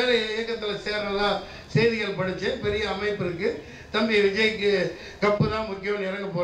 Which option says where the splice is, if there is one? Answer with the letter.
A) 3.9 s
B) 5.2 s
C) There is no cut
C